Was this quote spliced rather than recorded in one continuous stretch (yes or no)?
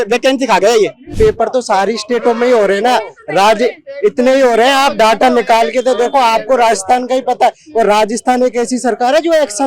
yes